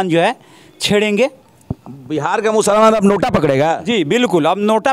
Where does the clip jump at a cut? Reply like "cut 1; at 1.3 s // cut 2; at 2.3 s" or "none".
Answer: none